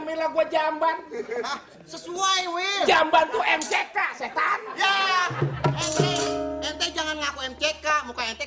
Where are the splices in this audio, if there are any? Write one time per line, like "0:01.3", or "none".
none